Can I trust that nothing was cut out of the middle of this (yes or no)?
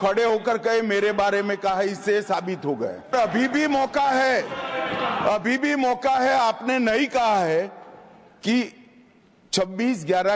no